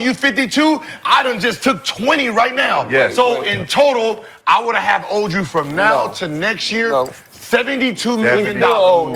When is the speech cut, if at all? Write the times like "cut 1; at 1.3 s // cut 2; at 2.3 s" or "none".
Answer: none